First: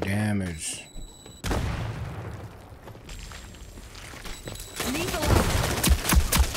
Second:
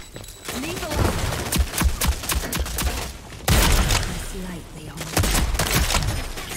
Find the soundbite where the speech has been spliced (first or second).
first